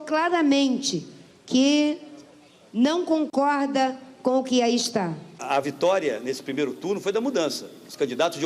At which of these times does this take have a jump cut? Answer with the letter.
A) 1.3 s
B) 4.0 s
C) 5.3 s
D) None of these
C